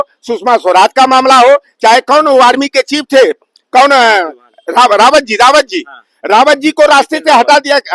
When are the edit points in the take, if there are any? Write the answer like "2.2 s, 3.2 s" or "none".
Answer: none